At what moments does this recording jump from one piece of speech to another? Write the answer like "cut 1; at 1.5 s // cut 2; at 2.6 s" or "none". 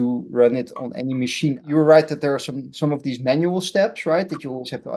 cut 1; at 1.6 s